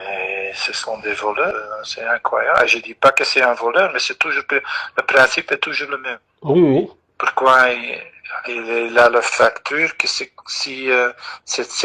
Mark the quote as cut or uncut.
cut